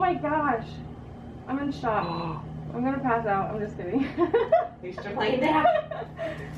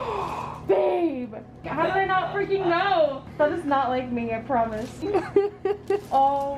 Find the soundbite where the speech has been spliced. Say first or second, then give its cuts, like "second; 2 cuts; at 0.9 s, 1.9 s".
second; 3 cuts; at 1.6 s, 3.2 s, 5.0 s